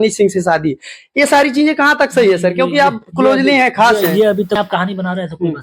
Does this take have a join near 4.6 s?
yes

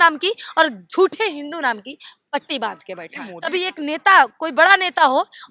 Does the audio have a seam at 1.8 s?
no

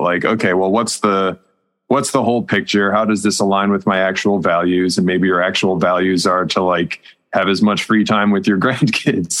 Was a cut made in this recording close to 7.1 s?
no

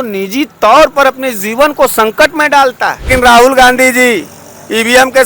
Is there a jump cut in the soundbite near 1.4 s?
no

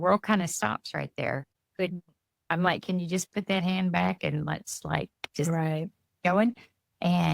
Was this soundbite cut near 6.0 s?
no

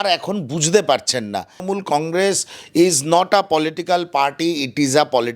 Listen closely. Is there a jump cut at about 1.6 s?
yes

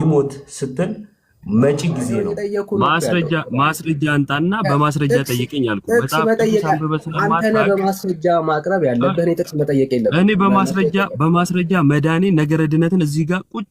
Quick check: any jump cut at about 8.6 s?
no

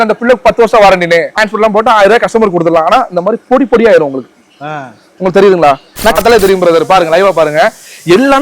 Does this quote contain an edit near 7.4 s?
no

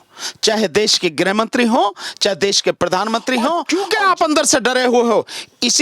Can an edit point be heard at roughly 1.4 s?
no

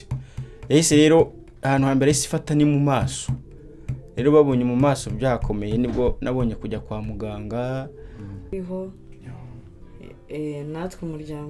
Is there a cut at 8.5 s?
yes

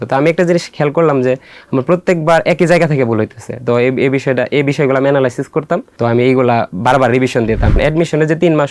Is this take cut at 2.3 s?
no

